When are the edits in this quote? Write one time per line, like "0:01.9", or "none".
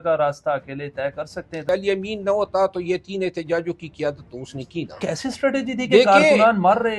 0:01.7
0:04.9